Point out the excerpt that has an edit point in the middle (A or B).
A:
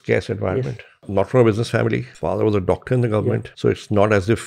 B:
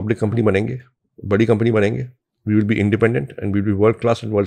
A